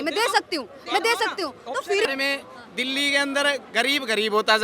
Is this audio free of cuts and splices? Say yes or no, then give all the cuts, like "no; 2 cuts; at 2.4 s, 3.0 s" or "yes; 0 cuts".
no; 1 cut; at 2.1 s